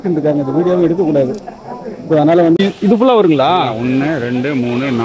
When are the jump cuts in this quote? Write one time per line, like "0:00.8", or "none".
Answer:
0:02.6